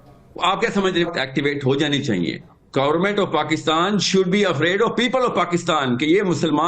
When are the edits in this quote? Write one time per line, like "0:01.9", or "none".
0:01.1